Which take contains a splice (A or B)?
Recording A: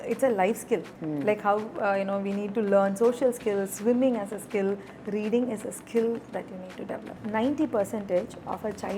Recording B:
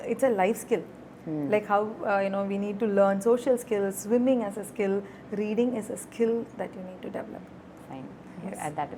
A